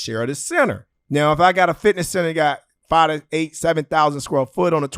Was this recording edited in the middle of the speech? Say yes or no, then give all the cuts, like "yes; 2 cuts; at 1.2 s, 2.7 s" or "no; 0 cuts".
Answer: yes; 1 cut; at 0.9 s